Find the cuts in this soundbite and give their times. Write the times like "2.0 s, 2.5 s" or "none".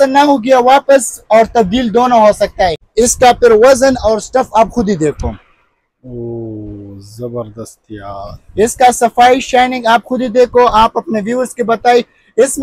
2.8 s